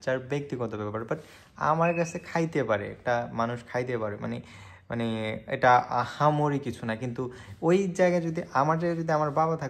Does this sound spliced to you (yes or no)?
no